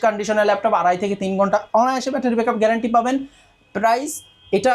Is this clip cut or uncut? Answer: uncut